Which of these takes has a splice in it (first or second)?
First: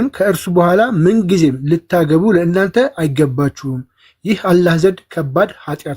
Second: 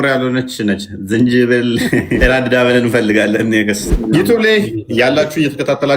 second